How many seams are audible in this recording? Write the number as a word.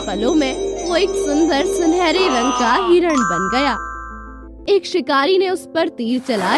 one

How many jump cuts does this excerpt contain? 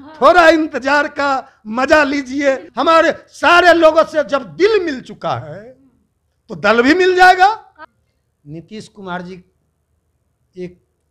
two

